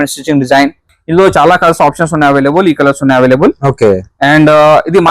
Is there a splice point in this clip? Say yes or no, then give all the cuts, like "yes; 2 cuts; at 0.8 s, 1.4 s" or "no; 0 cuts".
yes; 1 cut; at 0.9 s